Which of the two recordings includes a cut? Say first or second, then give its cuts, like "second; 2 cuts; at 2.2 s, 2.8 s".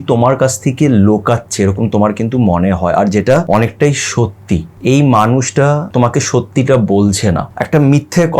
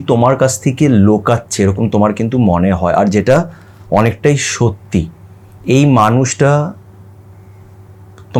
first; 4 cuts; at 3.5 s, 4.7 s, 5.9 s, 7.5 s